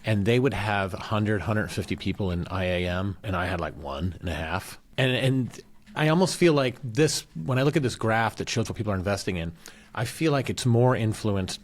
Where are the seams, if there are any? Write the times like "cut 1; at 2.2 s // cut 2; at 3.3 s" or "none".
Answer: cut 1; at 3.2 s // cut 2; at 4.8 s // cut 3; at 5.8 s